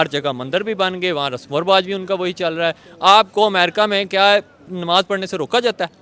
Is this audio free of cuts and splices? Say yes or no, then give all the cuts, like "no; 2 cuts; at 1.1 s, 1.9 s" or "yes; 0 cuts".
yes; 0 cuts